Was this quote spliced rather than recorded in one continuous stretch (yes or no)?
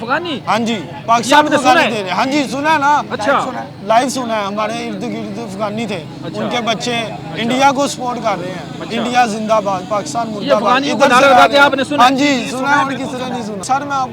no